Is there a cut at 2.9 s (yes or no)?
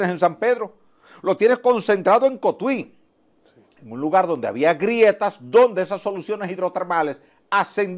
no